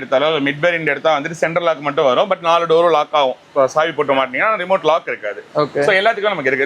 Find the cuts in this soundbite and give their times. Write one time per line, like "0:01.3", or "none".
none